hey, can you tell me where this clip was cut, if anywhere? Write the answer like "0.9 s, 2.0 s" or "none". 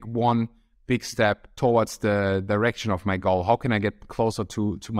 1.5 s